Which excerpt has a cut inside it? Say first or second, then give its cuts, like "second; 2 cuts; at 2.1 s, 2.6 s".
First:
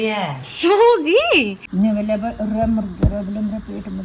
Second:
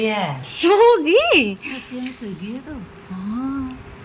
first; 1 cut; at 1.6 s